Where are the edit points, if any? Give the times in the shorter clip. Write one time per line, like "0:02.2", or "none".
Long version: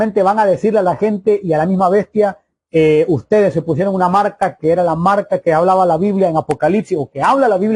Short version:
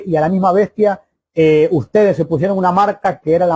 none